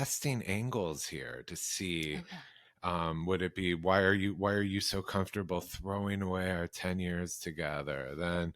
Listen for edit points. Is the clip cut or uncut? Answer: uncut